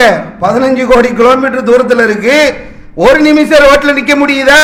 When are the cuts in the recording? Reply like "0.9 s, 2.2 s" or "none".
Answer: none